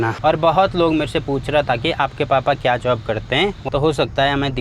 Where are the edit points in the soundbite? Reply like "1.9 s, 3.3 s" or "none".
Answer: 3.7 s